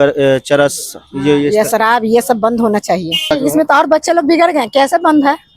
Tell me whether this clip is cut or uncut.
cut